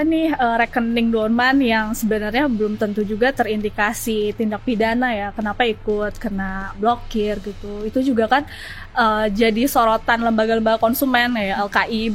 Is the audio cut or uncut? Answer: uncut